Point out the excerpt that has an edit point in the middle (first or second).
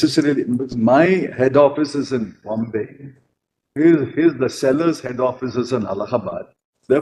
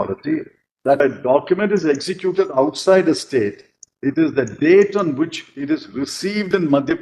second